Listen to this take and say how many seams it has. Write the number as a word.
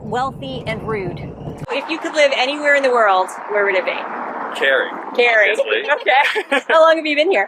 one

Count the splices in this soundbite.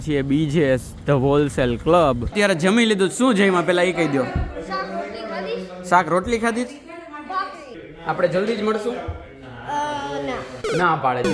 two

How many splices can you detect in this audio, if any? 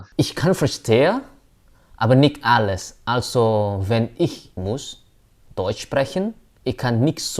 two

